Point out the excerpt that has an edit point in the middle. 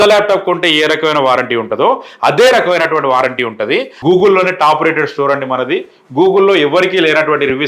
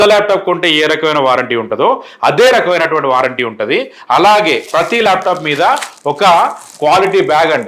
first; 1 cut; at 3.9 s

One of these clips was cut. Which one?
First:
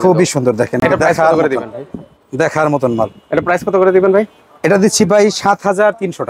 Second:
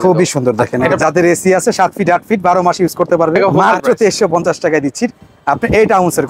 second; 2 cuts; at 1.0 s, 3.6 s

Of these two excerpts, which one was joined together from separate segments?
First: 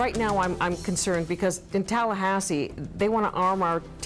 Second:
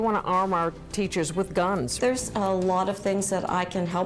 second; 1 cut; at 2.0 s

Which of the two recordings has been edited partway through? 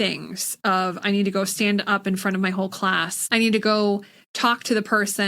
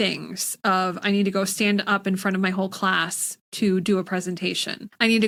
first; 1 cut; at 3.1 s

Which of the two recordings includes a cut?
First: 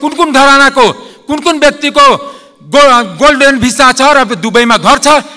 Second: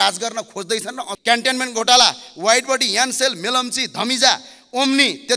second; 1 cut; at 1.0 s

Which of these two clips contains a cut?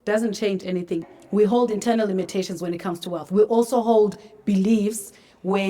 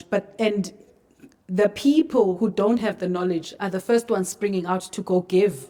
first; 1 cut; at 1.1 s

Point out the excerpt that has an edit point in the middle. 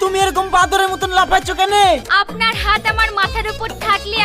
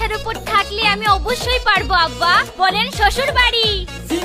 first; 1 cut; at 2.0 s

